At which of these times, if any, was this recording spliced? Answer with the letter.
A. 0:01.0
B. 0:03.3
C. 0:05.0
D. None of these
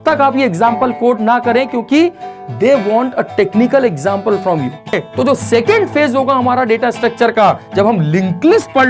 C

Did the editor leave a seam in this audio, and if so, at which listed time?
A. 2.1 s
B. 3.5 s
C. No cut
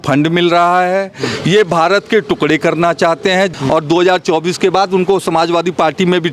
B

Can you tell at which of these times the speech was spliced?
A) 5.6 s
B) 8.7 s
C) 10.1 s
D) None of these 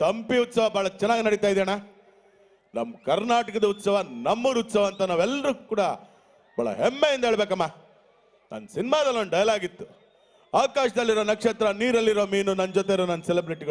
D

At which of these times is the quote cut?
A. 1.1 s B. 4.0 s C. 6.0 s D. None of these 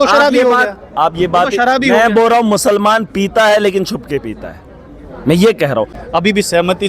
C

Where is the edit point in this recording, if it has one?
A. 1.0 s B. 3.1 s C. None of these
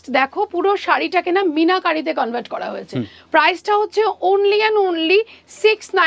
C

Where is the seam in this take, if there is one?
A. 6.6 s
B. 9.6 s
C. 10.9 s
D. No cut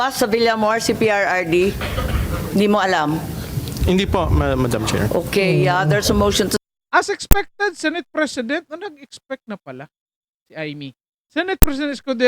A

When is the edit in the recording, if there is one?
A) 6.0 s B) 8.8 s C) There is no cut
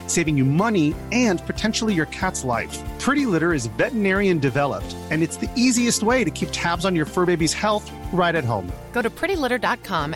C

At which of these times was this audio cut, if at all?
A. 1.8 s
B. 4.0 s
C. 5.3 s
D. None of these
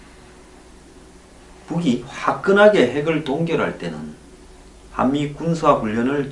C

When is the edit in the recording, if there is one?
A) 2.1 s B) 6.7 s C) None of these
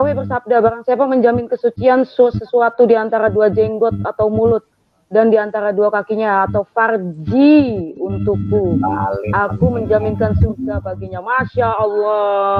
C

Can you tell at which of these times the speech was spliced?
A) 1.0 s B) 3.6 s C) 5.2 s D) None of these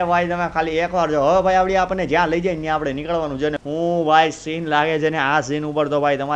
B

